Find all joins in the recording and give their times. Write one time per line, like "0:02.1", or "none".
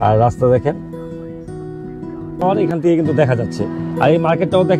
0:02.4